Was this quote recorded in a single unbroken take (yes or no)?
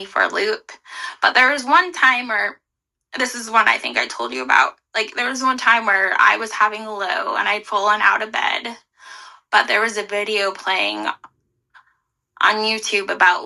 yes